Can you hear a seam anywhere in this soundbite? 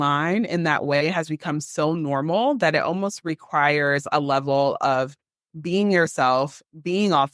no; 0 cuts

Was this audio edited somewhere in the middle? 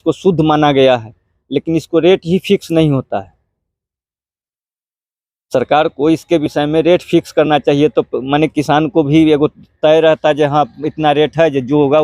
no; 0 cuts

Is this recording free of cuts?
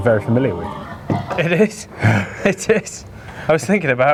yes; 0 cuts

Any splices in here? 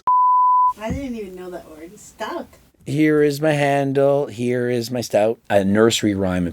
yes; 1 cut; at 5.4 s

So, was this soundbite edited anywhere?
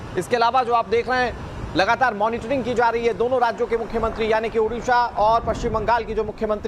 no; 0 cuts

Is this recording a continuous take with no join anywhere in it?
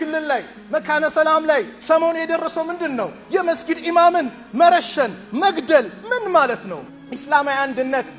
yes; 0 cuts

